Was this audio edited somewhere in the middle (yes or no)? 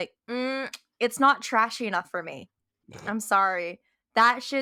no